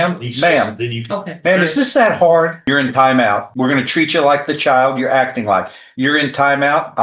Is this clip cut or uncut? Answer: cut